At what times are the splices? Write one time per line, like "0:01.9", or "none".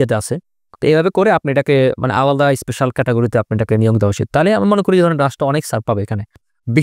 none